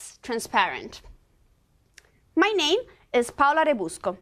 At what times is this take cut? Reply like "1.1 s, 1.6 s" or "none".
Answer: 2.1 s